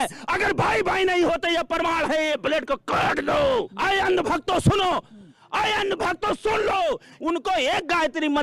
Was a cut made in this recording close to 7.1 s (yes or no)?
yes